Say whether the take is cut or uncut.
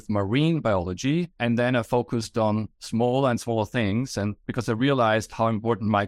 uncut